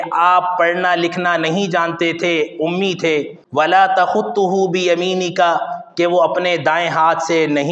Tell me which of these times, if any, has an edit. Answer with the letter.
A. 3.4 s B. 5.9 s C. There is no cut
A